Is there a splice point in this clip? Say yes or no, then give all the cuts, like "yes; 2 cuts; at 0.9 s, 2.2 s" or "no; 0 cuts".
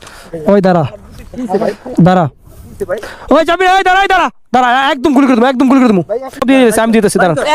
yes; 1 cut; at 6.4 s